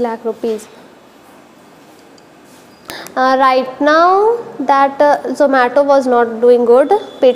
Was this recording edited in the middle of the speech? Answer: yes; 1 cut; at 3.0 s

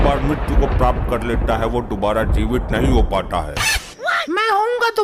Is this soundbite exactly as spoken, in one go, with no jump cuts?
yes; 0 cuts

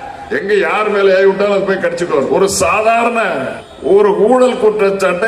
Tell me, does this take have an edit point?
yes; 2 cuts; at 2.3 s, 3.6 s

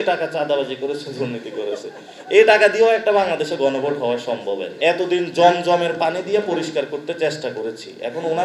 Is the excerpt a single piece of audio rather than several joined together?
no; 1 cut; at 4.7 s

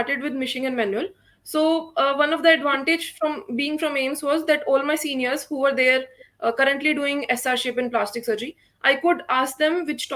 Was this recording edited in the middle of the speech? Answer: no; 0 cuts

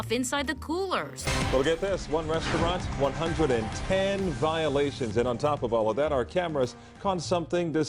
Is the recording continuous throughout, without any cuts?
no; 1 cut; at 1.2 s

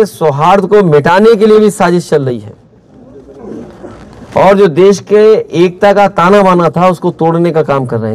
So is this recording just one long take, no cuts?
yes; 0 cuts

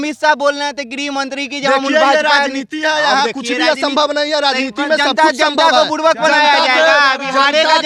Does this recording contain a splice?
no; 0 cuts

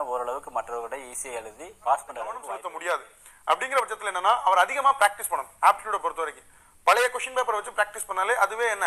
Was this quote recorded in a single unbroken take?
no; 1 cut; at 2.5 s

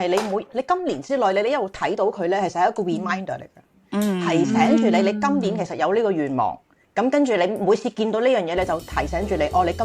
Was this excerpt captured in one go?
yes; 0 cuts

